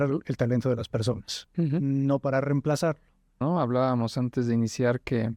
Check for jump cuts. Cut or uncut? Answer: cut